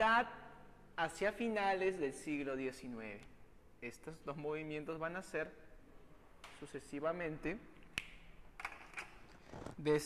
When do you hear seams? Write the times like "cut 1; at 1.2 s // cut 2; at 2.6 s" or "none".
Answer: cut 1; at 3.8 s